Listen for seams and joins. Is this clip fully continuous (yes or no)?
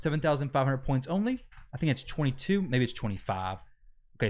yes